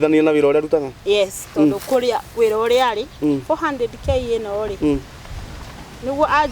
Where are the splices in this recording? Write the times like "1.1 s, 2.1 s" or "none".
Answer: none

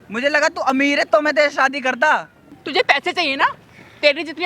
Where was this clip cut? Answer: 2.6 s

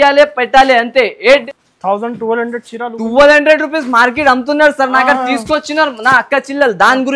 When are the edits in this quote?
1.4 s

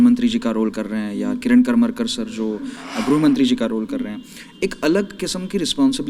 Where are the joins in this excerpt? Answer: none

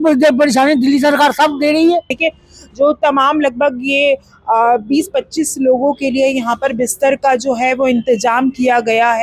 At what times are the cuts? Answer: 2.1 s

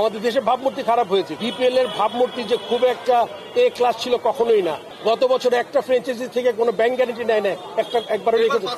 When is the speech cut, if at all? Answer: 1.3 s, 4.9 s

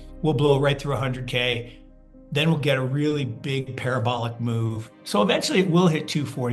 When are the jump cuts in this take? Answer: 5.0 s

